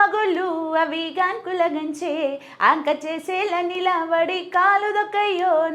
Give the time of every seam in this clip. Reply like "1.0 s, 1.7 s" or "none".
none